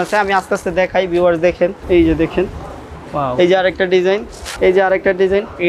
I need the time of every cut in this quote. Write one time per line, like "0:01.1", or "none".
none